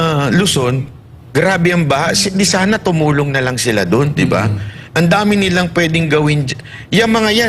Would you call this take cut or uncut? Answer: uncut